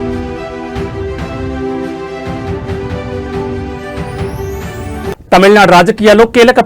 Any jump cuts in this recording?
no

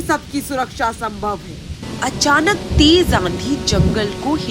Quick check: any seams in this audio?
yes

